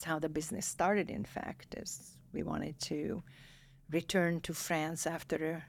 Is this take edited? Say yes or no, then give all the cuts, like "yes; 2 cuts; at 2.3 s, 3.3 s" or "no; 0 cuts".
no; 0 cuts